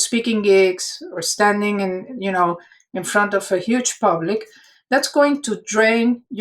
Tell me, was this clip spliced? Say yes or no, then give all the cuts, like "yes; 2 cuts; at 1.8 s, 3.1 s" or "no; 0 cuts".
no; 0 cuts